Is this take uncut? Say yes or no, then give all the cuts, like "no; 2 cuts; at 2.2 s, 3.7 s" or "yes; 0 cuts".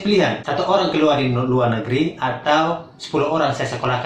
yes; 0 cuts